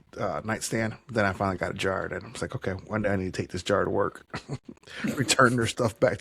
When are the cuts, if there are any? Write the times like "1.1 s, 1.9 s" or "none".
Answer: none